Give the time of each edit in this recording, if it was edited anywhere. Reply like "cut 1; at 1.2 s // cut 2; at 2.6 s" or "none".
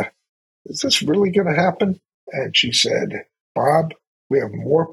cut 1; at 2.2 s // cut 2; at 3.3 s